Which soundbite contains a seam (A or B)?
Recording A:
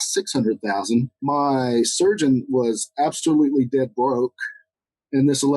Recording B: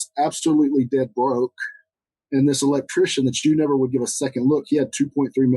A